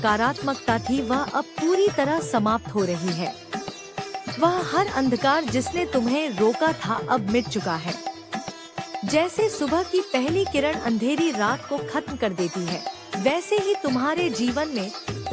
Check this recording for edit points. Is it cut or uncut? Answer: cut